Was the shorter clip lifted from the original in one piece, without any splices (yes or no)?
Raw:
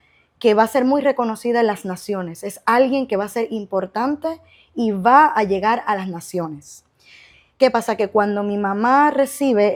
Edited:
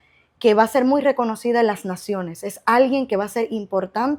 yes